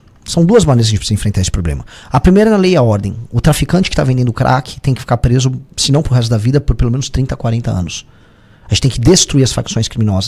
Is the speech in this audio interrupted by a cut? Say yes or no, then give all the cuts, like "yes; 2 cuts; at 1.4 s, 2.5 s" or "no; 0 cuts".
no; 0 cuts